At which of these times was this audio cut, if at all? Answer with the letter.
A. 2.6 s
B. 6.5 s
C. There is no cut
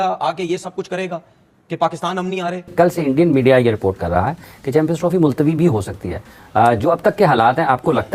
A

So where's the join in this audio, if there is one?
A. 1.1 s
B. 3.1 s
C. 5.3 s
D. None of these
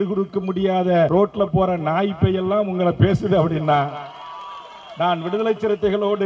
A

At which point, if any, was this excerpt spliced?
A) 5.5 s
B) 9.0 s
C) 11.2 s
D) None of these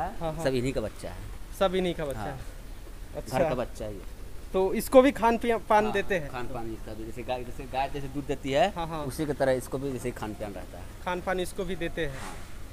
D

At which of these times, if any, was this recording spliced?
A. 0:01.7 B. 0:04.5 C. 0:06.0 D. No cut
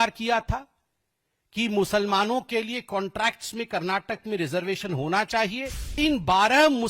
C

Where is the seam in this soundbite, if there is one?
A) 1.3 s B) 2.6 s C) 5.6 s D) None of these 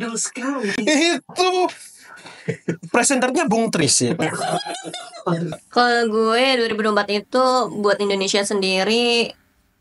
C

